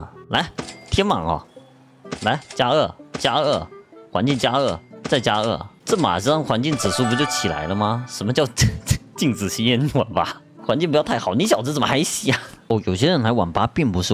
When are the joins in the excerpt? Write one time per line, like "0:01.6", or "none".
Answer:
0:10.4
0:12.6